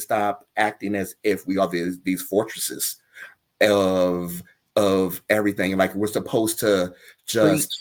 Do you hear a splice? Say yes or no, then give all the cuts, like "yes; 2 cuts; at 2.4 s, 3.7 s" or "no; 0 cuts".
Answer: no; 0 cuts